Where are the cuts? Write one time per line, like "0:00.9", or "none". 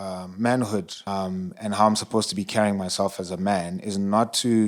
0:01.0